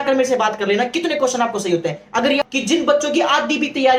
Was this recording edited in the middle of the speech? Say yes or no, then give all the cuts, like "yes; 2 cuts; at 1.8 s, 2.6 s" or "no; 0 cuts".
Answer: yes; 1 cut; at 2.4 s